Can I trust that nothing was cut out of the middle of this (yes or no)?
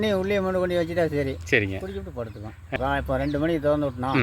no